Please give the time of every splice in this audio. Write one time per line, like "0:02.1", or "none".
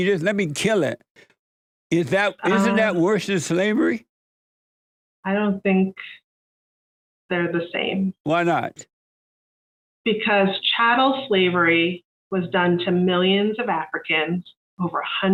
none